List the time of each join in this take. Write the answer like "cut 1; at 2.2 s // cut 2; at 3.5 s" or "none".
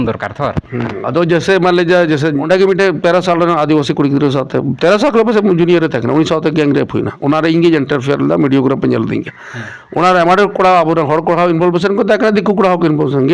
cut 1; at 2.4 s